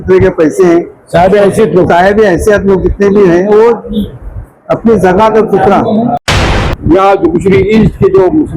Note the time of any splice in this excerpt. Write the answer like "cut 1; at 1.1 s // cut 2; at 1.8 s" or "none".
cut 1; at 6.4 s